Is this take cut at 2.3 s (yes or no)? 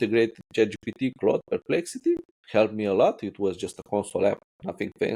yes